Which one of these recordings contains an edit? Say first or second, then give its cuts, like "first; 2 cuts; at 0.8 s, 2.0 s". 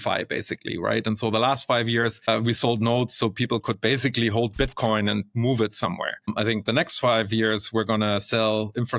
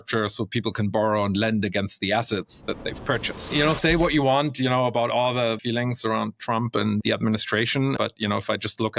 second; 4 cuts; at 3.5 s, 5.6 s, 7.0 s, 8.0 s